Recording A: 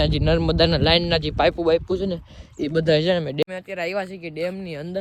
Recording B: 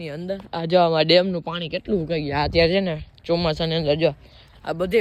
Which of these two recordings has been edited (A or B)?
A